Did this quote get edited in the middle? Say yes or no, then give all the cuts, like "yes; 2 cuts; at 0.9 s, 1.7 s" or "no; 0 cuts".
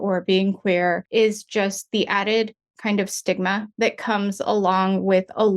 yes; 2 cuts; at 1.0 s, 3.7 s